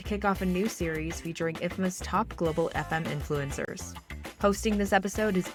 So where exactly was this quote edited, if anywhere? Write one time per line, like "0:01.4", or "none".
none